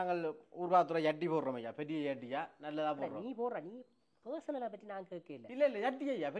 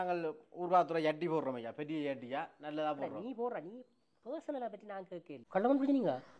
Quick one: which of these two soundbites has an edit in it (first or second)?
second